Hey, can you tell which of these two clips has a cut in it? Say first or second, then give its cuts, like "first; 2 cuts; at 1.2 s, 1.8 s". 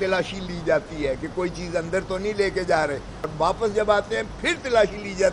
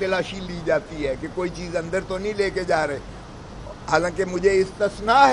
first; 1 cut; at 3.3 s